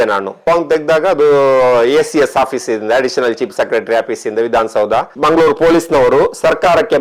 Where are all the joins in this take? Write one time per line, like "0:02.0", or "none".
0:05.1

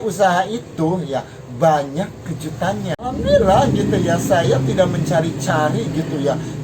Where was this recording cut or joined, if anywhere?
0:03.0

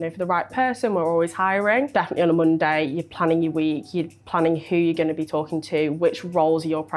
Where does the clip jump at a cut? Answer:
0:01.9

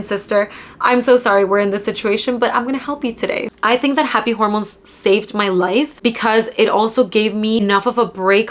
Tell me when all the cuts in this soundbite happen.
0:03.5
0:05.9
0:07.6

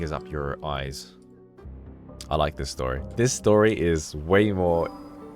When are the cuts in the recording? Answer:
0:01.6

